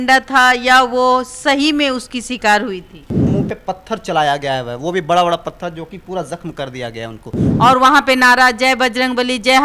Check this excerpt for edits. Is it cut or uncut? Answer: cut